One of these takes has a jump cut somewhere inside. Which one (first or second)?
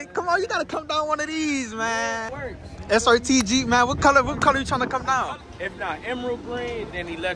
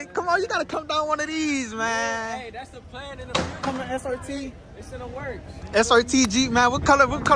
first